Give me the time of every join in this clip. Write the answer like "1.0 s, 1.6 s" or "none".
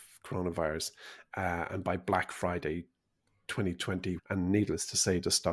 4.2 s